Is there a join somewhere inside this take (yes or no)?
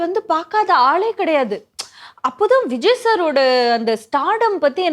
no